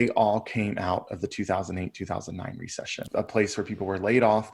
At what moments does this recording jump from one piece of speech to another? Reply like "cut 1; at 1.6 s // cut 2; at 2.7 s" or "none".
cut 1; at 3.0 s